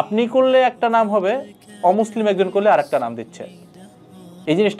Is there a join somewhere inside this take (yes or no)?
no